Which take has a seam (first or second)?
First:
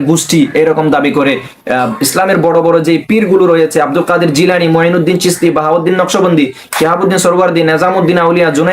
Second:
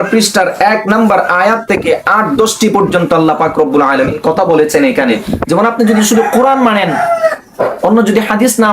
second